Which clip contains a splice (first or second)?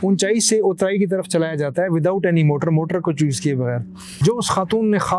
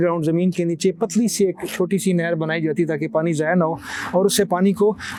first